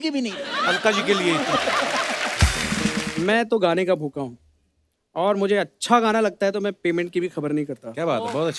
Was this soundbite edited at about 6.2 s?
no; 1 cut; at 3.1 s

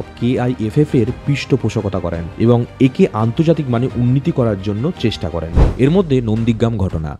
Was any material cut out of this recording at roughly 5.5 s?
yes; 1 cut; at 5.5 s

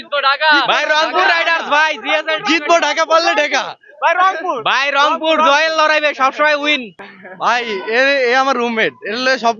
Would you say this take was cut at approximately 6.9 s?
yes; 1 cut; at 6.9 s

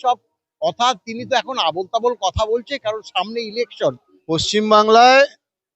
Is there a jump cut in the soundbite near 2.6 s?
no; 1 cut; at 4.1 s

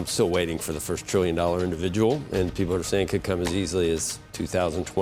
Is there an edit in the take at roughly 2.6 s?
no; 0 cuts

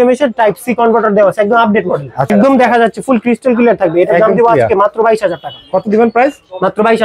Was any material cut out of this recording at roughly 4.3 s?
no; 1 cut; at 2.3 s

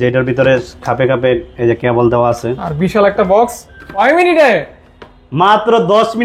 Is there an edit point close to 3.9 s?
yes; 1 cut; at 3.9 s

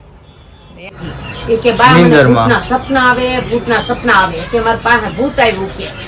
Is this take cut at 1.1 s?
yes; 1 cut; at 1.1 s

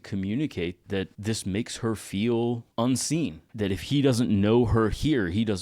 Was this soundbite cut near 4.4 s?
no; 2 cuts; at 1.1 s, 2.7 s

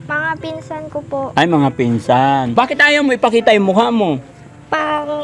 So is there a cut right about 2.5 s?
yes; 1 cut; at 2.5 s

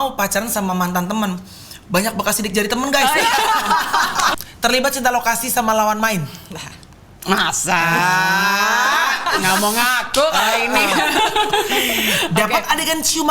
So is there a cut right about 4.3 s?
yes; 2 cuts; at 4.3 s, 11.2 s

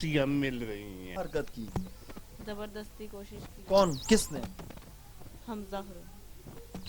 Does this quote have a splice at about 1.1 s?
yes; 1 cut; at 1.1 s

